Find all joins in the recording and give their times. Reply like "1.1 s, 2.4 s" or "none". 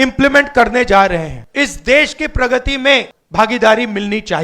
1.4 s, 3.2 s